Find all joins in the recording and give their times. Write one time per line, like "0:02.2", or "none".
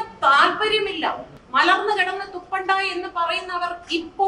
0:01.3